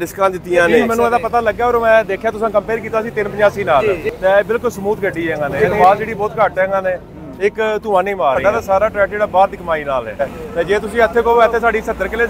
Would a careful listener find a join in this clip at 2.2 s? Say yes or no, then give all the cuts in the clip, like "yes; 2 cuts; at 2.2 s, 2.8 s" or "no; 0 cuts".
no; 5 cuts; at 0.8 s, 3.8 s, 5.6 s, 8.4 s, 10.2 s